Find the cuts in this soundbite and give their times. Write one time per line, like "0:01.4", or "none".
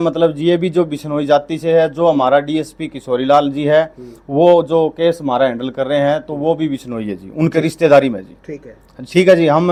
none